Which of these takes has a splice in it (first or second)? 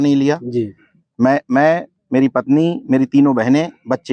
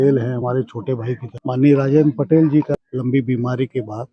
second